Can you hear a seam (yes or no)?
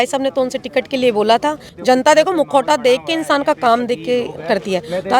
yes